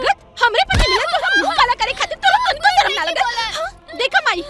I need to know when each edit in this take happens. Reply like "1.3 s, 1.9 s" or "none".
none